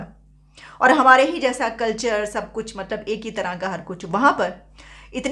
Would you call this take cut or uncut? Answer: uncut